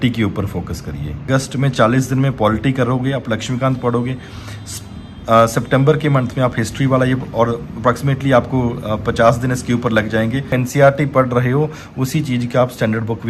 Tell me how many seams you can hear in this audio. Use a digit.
2